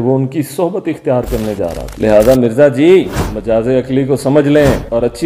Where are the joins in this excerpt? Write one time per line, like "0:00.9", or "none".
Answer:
0:01.8